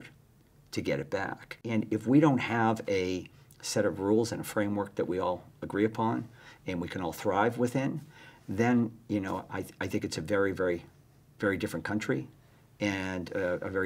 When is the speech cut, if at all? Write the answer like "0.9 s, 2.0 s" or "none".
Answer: 1.6 s